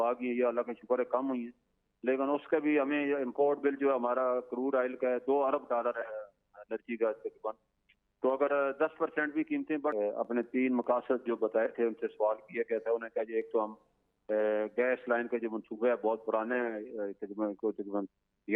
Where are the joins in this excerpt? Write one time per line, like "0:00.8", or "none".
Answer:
0:09.9